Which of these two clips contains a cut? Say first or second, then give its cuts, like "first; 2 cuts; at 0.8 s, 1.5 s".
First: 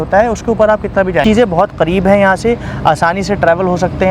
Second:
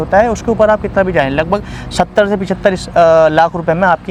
first; 1 cut; at 1.2 s